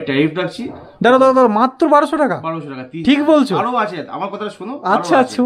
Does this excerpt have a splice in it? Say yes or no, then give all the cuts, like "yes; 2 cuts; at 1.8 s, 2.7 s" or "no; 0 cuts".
no; 0 cuts